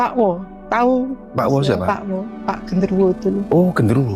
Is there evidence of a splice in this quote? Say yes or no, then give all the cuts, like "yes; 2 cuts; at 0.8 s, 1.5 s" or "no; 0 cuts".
no; 0 cuts